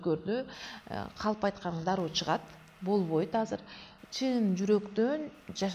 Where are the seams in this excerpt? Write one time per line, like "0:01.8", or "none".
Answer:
none